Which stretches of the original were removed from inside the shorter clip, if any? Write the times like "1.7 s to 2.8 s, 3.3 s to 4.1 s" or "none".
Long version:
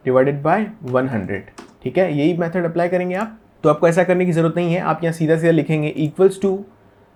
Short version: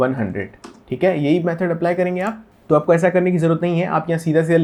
none